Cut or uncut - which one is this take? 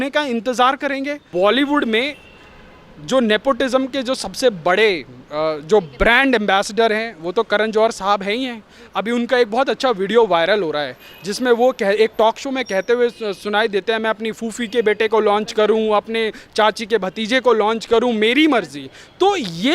cut